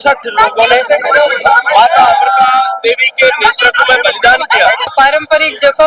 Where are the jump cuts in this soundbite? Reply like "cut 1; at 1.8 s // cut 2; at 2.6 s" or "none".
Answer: cut 1; at 4.9 s